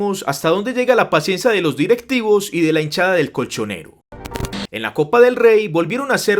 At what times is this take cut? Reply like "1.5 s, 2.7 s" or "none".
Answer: 4.3 s